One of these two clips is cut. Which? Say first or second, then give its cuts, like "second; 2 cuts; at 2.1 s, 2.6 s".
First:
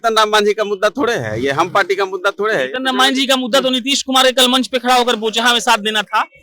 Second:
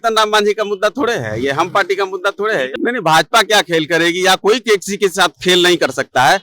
second; 1 cut; at 2.7 s